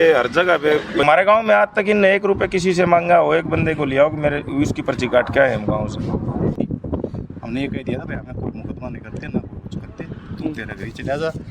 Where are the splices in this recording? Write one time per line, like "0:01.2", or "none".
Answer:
0:01.0
0:06.5